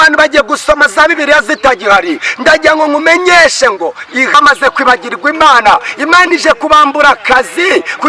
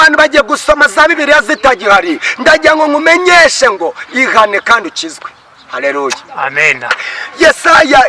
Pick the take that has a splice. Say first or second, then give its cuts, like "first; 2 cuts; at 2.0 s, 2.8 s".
first; 1 cut; at 4.3 s